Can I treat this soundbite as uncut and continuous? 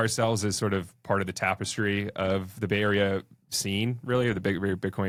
yes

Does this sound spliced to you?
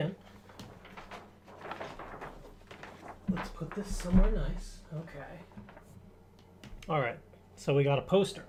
no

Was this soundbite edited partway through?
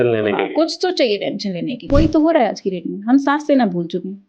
yes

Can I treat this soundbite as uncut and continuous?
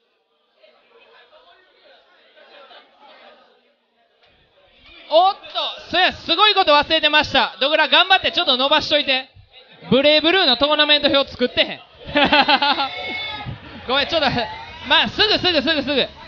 no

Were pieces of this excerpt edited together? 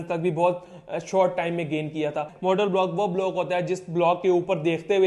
yes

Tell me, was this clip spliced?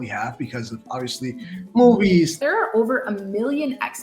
yes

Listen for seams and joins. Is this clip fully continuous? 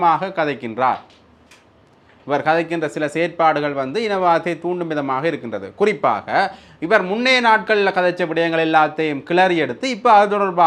yes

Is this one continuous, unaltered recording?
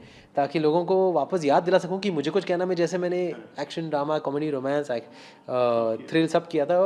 yes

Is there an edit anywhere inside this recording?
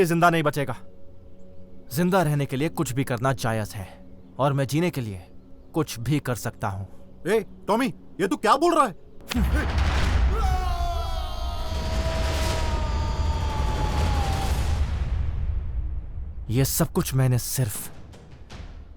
yes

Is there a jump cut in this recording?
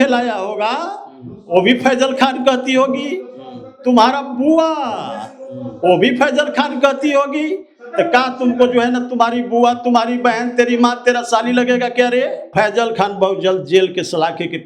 yes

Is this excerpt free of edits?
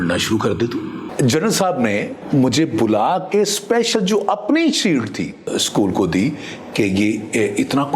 no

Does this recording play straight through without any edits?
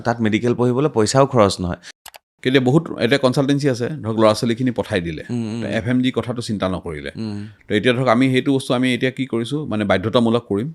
no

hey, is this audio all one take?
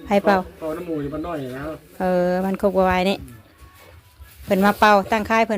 yes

